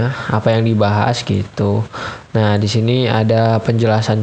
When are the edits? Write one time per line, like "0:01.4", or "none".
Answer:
none

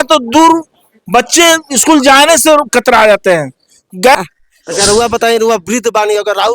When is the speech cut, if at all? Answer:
0:04.1

